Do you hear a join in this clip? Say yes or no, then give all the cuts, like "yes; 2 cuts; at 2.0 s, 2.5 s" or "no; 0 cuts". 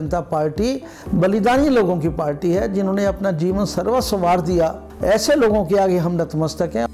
yes; 2 cuts; at 0.9 s, 4.9 s